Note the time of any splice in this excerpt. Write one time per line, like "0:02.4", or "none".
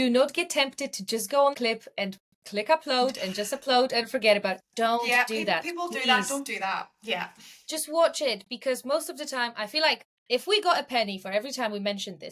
0:01.9